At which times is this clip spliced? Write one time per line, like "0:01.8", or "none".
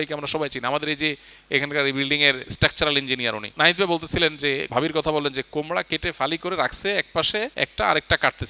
0:03.5
0:04.7
0:07.5